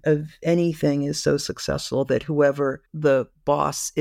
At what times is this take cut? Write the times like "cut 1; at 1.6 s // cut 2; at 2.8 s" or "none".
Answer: cut 1; at 2.9 s